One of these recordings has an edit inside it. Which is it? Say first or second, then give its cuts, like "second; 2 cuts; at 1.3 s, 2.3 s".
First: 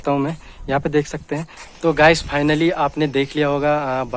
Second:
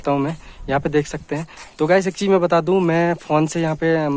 first; 1 cut; at 1.6 s